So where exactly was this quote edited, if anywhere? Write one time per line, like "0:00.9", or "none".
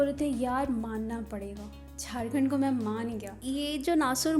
0:03.3